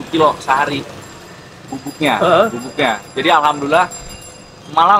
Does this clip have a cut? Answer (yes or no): no